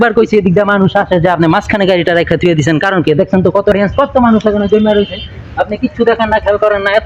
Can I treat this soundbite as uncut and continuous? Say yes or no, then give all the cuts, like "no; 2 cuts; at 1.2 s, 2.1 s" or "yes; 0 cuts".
yes; 0 cuts